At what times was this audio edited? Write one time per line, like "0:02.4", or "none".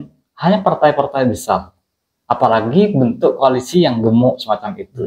none